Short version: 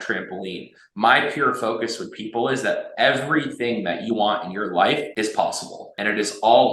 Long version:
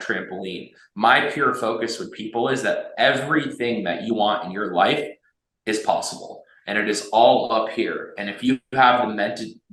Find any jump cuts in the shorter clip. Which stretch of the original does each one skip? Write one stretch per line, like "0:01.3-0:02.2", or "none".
0:05.5-0:06.2